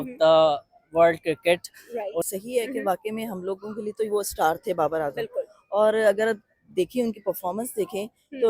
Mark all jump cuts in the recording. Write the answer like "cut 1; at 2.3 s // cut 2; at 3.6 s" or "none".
cut 1; at 2.2 s